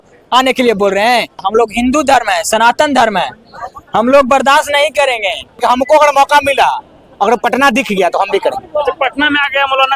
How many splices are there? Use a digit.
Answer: 2